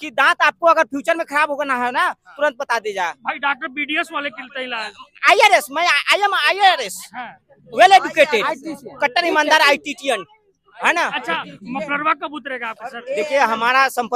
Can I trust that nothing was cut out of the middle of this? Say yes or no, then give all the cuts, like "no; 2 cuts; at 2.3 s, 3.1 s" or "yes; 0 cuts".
yes; 0 cuts